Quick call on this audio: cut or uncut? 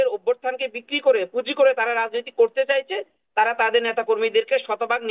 uncut